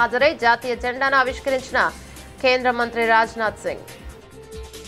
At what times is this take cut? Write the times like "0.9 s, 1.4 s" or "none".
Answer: 4.0 s